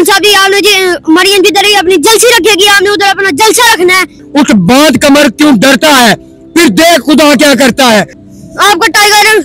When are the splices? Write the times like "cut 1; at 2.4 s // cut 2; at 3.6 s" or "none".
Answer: cut 1; at 4.2 s // cut 2; at 8.2 s